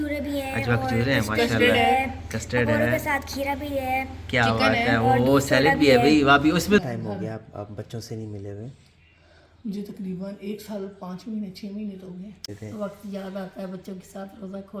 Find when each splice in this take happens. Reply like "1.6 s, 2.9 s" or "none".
6.8 s, 12.5 s